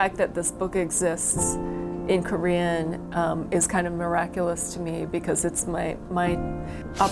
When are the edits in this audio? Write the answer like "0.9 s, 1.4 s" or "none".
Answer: none

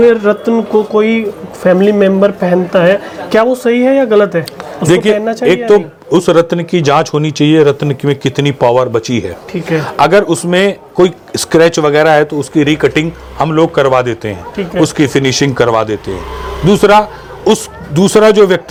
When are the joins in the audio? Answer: none

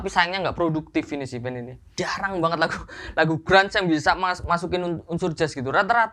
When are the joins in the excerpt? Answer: 1.8 s

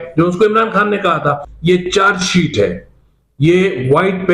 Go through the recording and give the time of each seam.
1.5 s

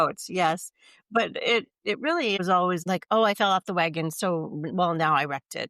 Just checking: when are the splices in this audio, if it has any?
2.8 s

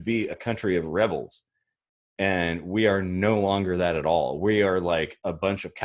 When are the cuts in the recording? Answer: none

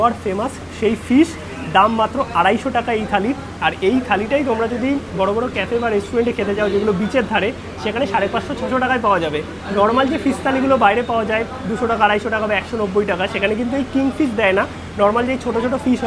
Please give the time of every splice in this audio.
none

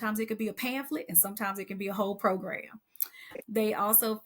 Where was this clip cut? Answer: 3.4 s

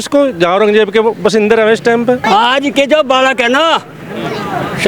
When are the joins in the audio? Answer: 2.2 s

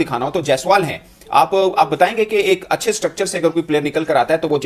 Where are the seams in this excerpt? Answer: none

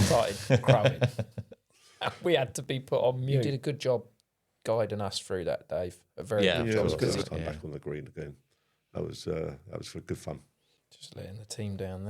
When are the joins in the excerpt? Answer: 3.5 s, 7.2 s

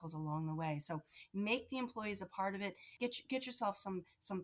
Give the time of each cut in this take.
2.8 s

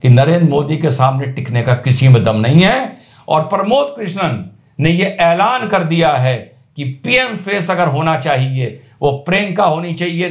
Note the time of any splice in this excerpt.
none

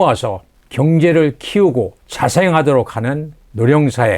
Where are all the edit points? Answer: 2.0 s

